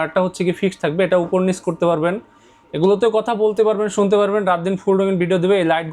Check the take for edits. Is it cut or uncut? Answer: uncut